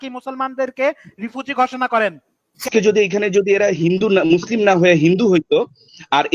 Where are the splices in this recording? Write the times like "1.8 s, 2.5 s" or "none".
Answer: 2.6 s